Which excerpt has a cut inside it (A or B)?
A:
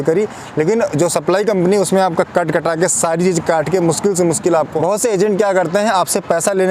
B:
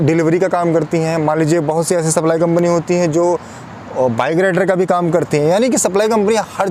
A